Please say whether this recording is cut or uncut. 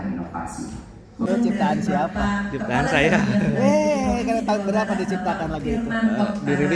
cut